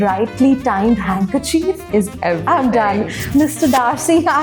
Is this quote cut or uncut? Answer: uncut